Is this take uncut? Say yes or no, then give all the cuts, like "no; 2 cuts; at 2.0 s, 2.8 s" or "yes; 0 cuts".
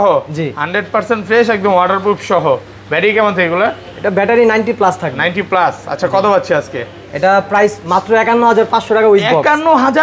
yes; 0 cuts